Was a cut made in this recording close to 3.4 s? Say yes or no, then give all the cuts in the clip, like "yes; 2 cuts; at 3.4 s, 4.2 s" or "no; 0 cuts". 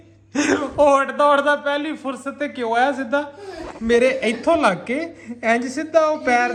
no; 0 cuts